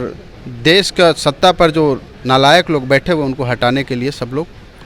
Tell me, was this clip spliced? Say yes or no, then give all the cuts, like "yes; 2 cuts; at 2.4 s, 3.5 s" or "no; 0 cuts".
no; 0 cuts